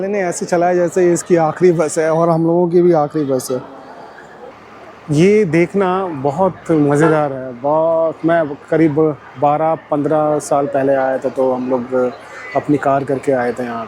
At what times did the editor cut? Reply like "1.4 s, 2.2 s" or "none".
4.5 s